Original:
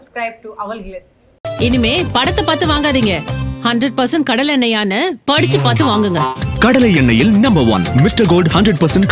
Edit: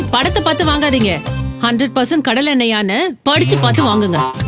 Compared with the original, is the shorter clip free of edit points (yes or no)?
yes